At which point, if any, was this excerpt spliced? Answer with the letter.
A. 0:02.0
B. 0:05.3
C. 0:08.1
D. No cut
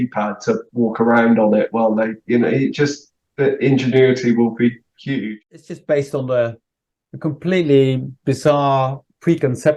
B